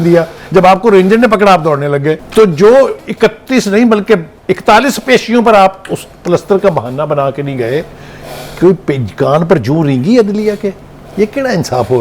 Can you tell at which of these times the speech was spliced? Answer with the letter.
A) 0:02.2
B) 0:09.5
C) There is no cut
A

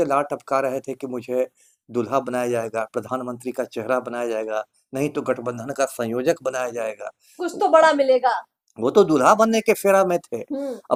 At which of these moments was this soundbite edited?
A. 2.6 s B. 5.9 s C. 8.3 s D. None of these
D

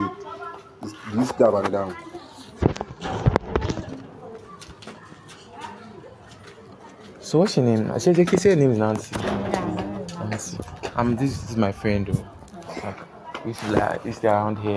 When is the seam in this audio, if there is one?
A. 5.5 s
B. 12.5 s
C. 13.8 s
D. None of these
D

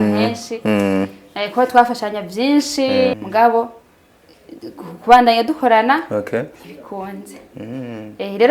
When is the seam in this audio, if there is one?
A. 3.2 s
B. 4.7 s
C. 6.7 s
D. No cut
A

